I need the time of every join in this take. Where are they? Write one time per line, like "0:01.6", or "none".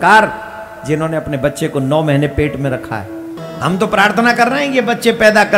0:03.4

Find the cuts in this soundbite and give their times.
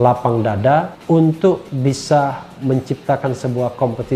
none

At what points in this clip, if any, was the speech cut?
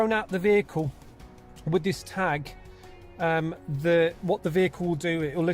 none

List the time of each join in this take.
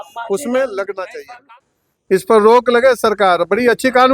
0:01.6

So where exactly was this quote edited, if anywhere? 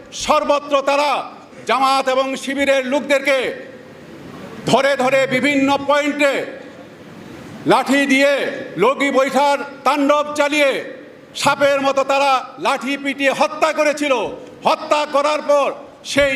none

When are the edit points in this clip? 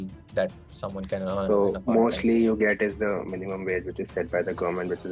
none

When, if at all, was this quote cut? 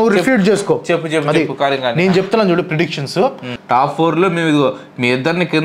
0:03.5

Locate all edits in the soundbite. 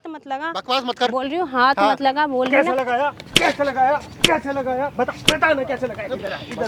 none

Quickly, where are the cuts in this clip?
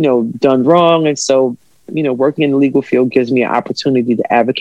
none

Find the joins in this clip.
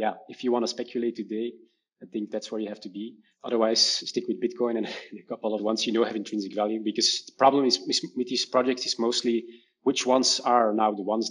0:03.3
0:05.6

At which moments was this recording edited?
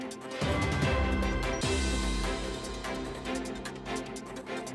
none

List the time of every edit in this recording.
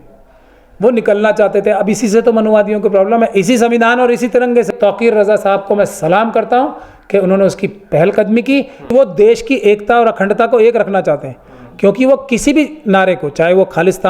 0:04.7
0:08.9

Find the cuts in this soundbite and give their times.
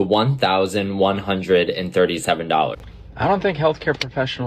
0:02.8

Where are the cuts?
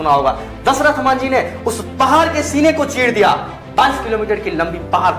none

